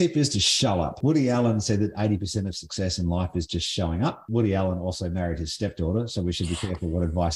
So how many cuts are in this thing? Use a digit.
2